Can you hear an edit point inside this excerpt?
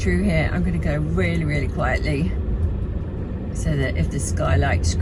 no; 0 cuts

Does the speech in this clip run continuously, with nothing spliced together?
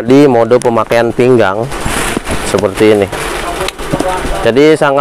yes; 0 cuts

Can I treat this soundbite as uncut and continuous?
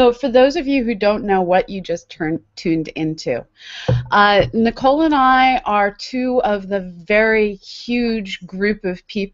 yes; 0 cuts

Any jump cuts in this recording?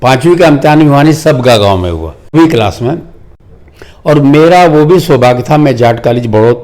yes; 1 cut; at 2.3 s

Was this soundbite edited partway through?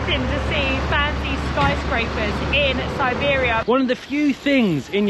yes; 1 cut; at 3.6 s

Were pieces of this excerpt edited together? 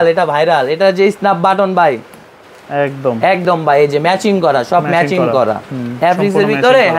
no; 0 cuts

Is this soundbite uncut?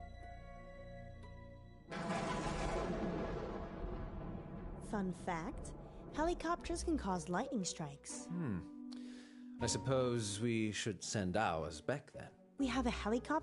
no; 1 cut; at 1.7 s

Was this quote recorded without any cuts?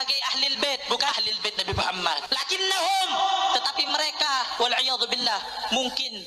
no; 1 cut; at 1.1 s

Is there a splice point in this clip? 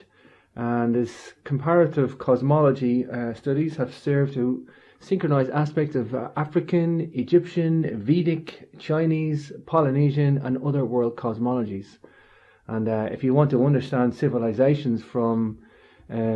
yes; 1 cut; at 8.1 s

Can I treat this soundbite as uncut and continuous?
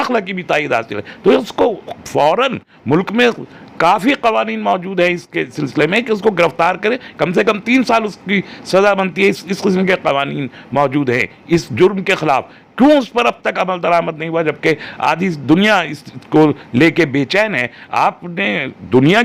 yes; 0 cuts

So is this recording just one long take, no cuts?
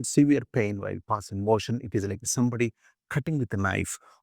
yes; 0 cuts

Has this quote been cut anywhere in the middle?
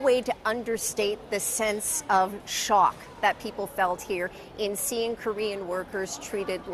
no; 0 cuts

